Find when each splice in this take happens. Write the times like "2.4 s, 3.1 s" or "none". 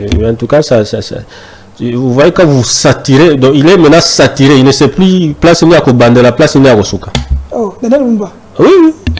none